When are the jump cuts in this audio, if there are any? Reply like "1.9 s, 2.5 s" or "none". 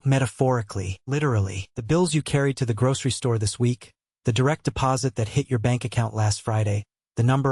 1.2 s